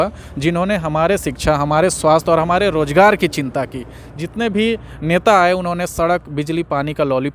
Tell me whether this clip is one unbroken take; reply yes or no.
yes